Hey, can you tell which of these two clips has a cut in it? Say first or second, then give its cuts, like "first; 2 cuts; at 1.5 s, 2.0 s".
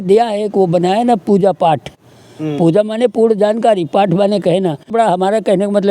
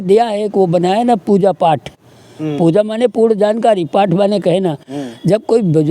first; 1 cut; at 4.9 s